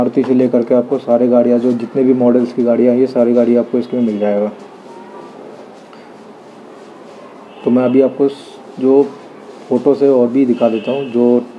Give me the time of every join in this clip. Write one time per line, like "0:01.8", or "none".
none